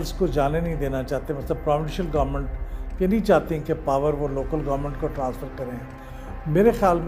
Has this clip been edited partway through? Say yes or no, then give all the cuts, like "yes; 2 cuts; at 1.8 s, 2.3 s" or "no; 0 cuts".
no; 0 cuts